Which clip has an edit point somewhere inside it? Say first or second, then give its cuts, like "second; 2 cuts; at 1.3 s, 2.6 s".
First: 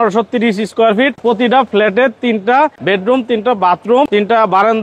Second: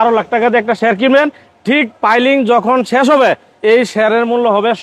first; 3 cuts; at 1.2 s, 2.8 s, 4.1 s